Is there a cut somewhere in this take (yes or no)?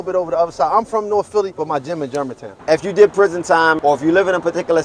yes